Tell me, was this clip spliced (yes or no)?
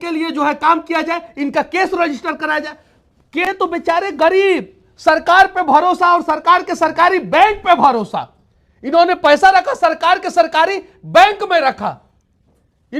yes